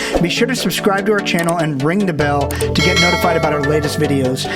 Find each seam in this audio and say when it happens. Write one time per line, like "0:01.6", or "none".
none